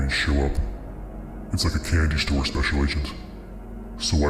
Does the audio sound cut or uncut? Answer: uncut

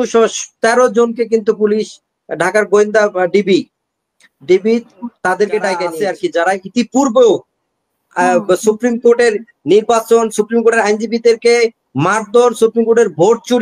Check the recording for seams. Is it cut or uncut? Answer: cut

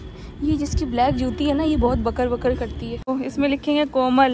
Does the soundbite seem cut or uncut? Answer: cut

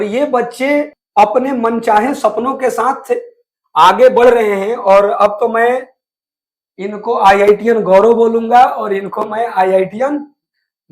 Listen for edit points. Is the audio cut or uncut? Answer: cut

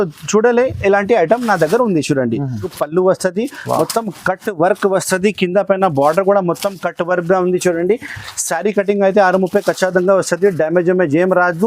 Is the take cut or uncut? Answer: cut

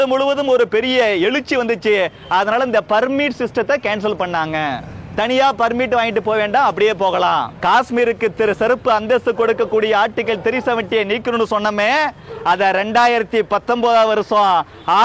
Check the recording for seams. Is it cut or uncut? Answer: cut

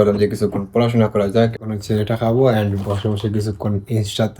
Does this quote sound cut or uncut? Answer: cut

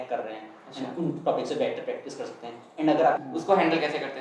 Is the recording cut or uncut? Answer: cut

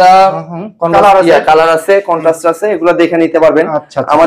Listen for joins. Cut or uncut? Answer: uncut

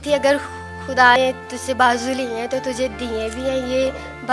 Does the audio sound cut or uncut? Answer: cut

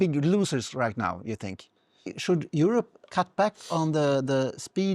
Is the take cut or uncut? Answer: cut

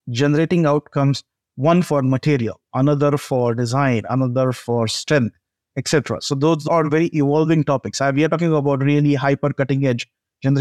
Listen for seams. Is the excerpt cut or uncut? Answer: cut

